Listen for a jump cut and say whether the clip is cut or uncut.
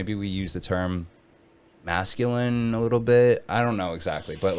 uncut